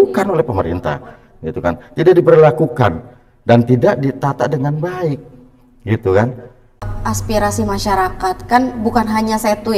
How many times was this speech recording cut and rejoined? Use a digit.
1